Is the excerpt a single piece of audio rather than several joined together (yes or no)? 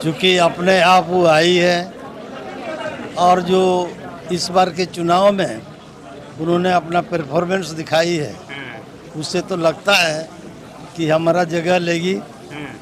yes